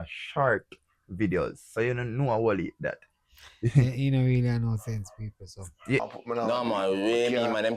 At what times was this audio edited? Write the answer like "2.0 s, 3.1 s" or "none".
6.0 s